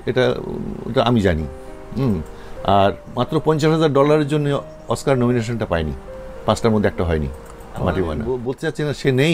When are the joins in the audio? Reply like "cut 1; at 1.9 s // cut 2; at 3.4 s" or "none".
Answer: cut 1; at 8.2 s